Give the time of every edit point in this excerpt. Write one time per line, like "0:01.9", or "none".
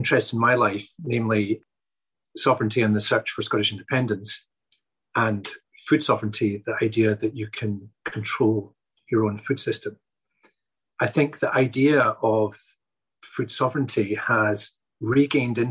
0:01.6
0:10.8